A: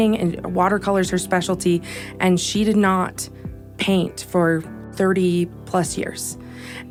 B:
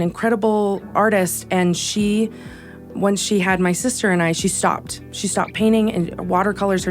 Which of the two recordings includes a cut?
B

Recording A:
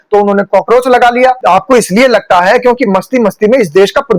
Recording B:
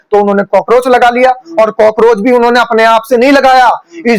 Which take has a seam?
A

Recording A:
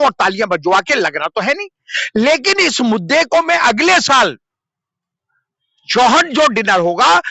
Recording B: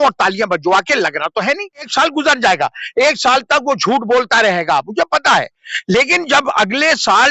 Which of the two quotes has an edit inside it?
B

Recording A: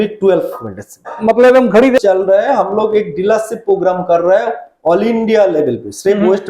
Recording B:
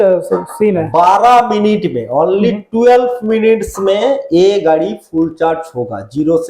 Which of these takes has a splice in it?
A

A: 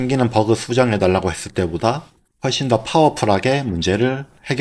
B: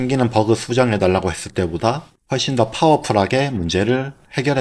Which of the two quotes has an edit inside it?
B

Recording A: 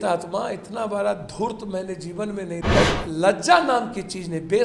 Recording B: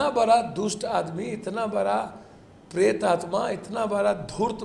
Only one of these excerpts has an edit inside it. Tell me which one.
A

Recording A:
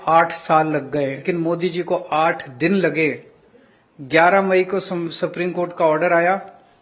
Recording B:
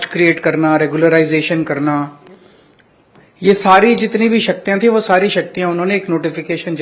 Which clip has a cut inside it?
A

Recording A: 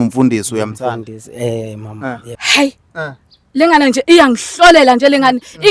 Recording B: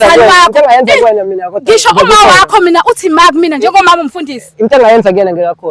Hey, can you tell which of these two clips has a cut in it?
A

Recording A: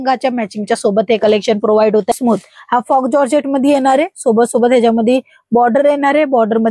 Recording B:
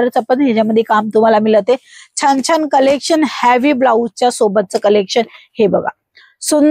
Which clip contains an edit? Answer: A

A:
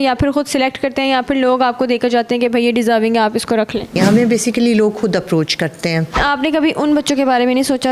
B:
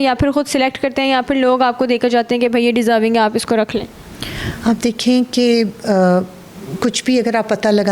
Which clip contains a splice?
A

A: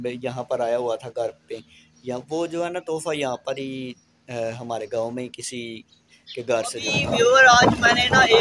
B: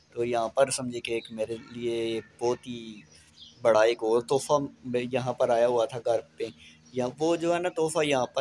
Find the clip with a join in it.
A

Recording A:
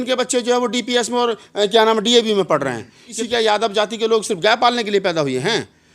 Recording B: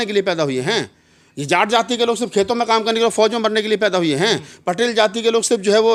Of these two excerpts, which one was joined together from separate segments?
A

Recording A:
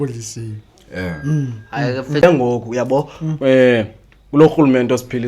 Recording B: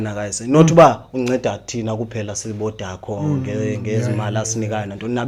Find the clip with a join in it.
A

